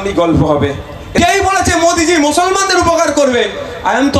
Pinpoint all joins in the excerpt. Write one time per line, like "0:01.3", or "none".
0:01.0